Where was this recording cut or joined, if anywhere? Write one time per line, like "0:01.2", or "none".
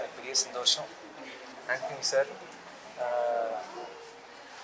none

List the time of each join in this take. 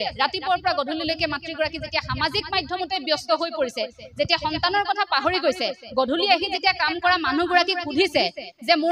none

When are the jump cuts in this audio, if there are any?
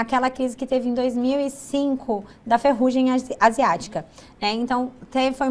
none

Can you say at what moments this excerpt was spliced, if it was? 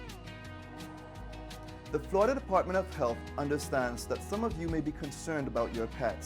0:01.7

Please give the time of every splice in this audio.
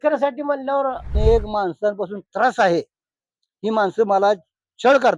0:01.2

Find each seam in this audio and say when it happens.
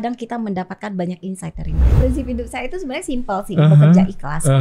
0:02.0

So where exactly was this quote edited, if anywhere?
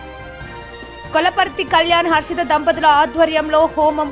0:01.1

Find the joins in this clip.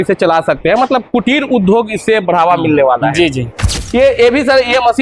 0:03.7

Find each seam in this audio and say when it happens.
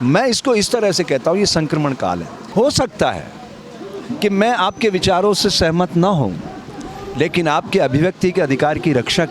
0:02.3

